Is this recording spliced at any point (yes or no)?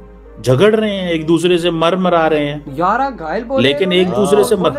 no